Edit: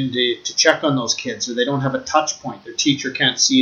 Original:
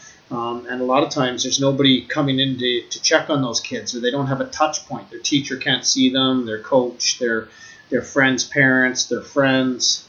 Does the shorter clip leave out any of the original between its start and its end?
no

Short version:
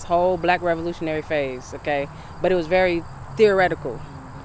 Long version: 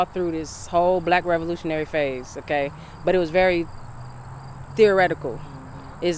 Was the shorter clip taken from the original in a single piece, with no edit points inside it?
no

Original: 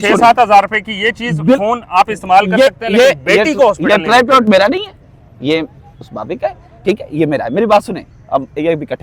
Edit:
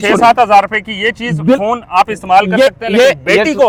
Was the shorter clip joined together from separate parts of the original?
no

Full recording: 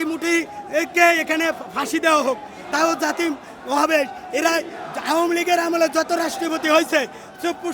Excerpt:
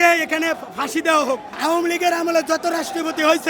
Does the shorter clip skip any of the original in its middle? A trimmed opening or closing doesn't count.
yes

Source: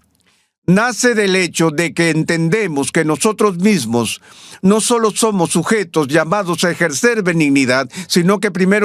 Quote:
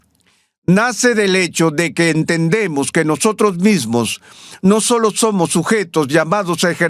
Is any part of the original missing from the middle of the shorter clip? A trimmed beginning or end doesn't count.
no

